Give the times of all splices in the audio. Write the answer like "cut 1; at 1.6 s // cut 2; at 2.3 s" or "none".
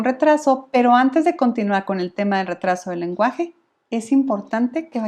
none

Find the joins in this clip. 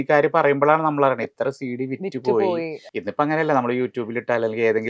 cut 1; at 2.8 s

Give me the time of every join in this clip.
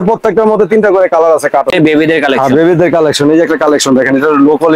cut 1; at 1.7 s

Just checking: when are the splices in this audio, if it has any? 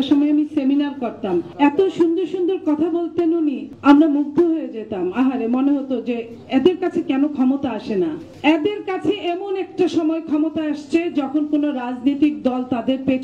none

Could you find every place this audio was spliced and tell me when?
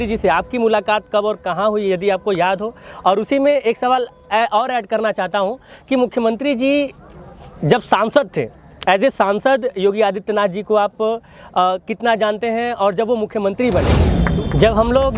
cut 1; at 14.2 s

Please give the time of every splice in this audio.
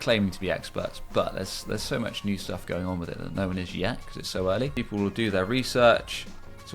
cut 1; at 4.7 s

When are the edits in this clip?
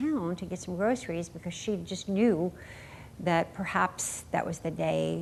none

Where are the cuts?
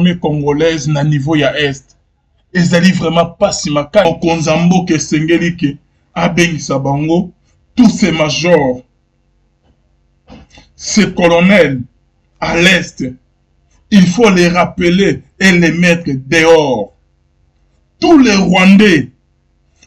cut 1; at 4.1 s

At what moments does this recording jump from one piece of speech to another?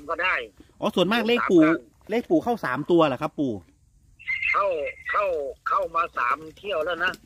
none

